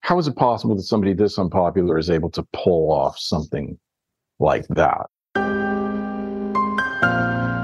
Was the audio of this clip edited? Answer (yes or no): yes